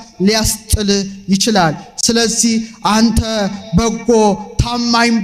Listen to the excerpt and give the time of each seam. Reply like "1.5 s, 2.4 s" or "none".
none